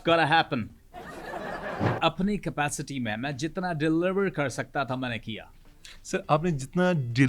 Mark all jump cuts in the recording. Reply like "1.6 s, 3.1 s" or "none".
1.9 s